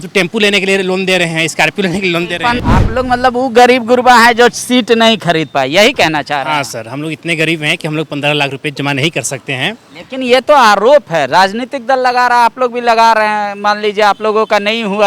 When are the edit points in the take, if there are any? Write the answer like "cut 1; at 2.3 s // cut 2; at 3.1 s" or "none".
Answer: cut 1; at 2.6 s

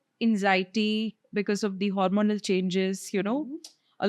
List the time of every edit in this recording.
none

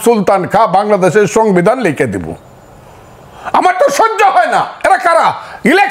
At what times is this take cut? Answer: none

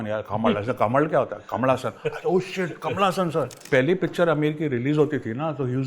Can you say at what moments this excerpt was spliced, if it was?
cut 1; at 3.6 s

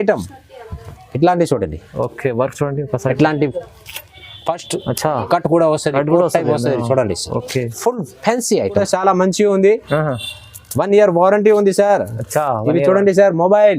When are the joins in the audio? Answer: cut 1; at 8.8 s

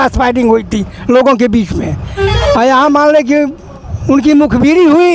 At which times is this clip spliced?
none

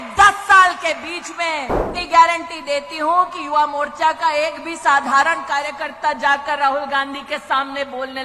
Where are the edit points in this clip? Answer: cut 1; at 1.9 s

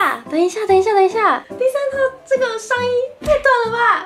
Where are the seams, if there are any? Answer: cut 1; at 1.5 s

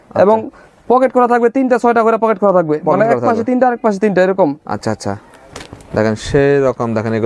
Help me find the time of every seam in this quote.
none

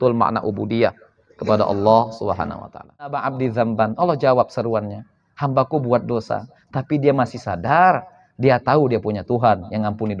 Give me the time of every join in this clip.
cut 1; at 3.2 s

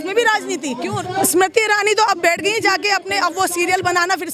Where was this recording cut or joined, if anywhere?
cut 1; at 0.9 s

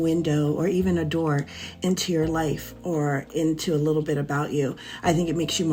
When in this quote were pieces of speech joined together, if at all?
none

